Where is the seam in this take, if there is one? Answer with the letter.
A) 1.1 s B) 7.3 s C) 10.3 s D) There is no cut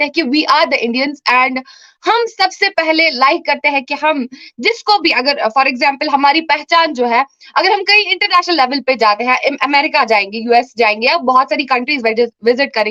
D